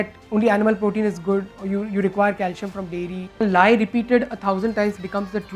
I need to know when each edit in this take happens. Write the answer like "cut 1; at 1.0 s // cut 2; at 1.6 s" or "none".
cut 1; at 3.4 s